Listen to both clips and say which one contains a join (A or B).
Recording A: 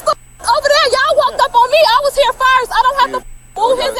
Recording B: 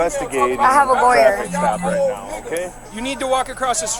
B